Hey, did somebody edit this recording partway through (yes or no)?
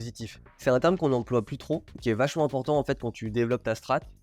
yes